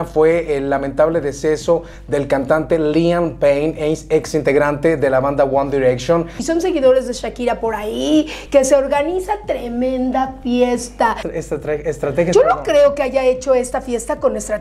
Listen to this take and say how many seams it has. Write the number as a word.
two